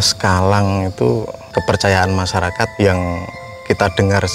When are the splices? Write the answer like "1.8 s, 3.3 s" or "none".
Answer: 1.4 s, 2.7 s